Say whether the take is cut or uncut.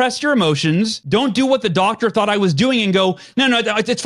cut